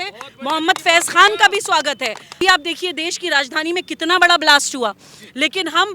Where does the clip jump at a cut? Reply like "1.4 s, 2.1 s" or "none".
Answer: 2.4 s